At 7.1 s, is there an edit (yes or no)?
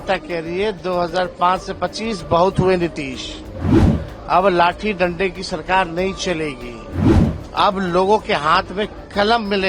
yes